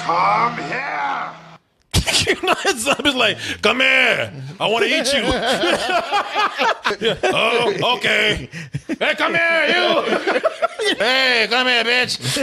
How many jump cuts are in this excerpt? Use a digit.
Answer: 1